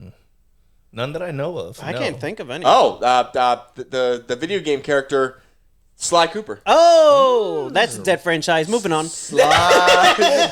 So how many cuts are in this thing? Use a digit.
0